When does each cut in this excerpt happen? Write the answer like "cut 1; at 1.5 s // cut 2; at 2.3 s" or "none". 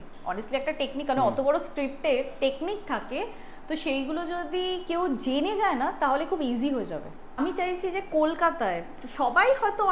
cut 1; at 7.4 s